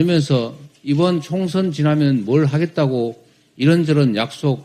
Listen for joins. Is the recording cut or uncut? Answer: uncut